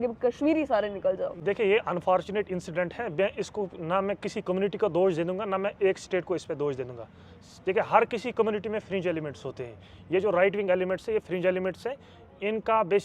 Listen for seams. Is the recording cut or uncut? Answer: uncut